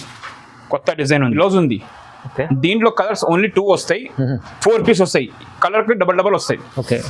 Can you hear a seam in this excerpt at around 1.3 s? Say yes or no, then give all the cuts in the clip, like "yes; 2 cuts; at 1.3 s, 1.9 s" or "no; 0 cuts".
yes; 1 cut; at 1.3 s